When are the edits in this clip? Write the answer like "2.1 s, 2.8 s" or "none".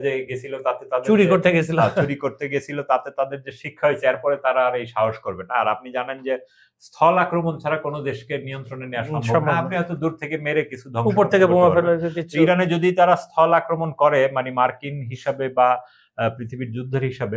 none